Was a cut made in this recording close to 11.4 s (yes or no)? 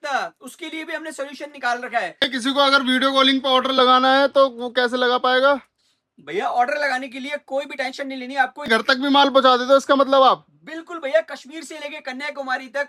no